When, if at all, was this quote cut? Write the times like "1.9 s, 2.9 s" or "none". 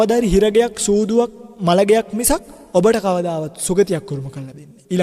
1.4 s, 2.5 s